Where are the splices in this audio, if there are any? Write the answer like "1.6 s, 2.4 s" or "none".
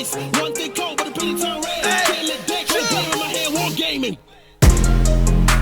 4.0 s